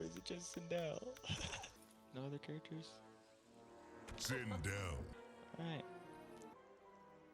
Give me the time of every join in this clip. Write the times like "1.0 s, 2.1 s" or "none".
1.8 s, 5.1 s, 6.5 s